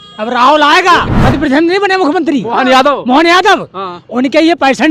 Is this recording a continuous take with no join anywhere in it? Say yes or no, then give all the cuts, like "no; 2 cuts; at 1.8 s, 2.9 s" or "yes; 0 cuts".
no; 1 cut; at 1.1 s